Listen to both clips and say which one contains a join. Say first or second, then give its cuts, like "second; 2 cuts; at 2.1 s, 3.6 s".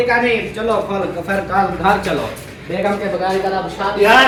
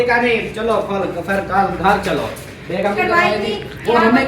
second; 1 cut; at 2.9 s